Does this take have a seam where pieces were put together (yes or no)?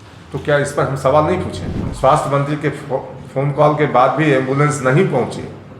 yes